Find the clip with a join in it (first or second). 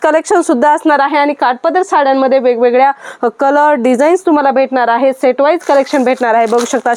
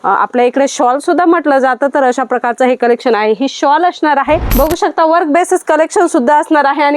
second